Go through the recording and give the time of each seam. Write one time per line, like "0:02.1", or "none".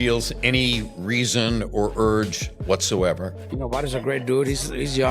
0:03.4